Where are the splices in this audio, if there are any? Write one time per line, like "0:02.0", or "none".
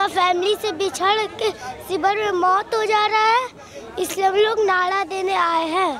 none